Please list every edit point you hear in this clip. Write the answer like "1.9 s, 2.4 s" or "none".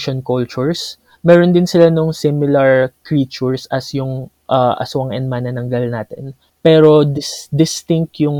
6.4 s